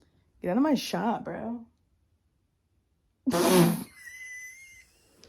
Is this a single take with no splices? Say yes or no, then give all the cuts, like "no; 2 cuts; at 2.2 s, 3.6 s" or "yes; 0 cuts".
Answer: yes; 0 cuts